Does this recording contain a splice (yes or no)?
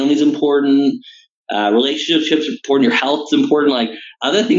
no